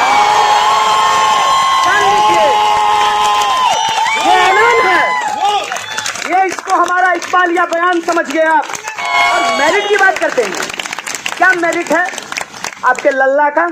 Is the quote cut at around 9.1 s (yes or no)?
yes